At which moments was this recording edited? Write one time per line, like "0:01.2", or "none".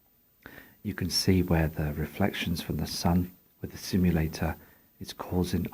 0:04.4